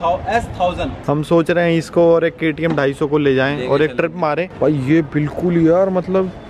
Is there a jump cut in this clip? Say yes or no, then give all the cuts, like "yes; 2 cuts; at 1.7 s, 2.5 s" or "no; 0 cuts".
yes; 2 cuts; at 1.0 s, 4.5 s